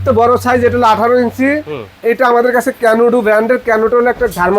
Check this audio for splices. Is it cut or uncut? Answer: uncut